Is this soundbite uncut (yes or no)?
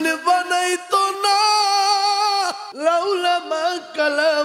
no